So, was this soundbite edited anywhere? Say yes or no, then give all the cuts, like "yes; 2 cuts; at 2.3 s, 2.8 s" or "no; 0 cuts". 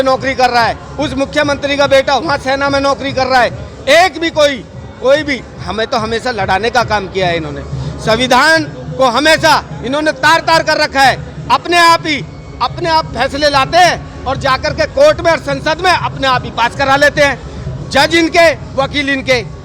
no; 0 cuts